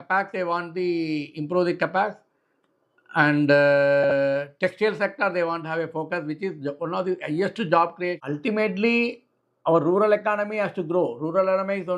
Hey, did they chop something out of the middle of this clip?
yes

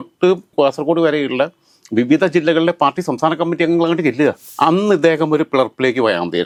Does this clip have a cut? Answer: no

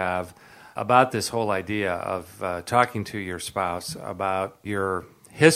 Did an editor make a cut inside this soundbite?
yes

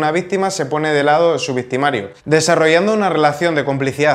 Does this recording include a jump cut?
yes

